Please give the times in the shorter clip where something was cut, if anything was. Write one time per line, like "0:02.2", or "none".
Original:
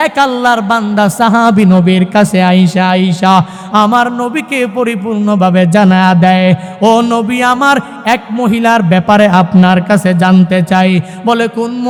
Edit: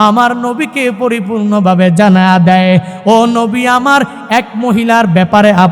none

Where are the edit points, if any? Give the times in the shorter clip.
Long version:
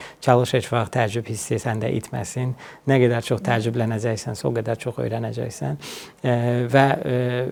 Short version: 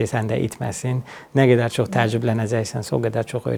none

